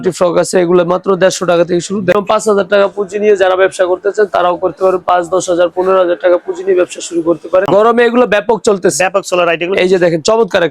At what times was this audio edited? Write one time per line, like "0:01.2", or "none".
0:02.1
0:07.7